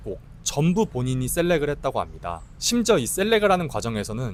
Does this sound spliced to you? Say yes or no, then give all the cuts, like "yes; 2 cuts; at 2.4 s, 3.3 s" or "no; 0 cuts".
no; 0 cuts